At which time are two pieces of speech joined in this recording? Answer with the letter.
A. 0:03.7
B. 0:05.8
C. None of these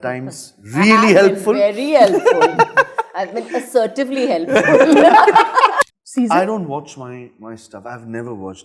B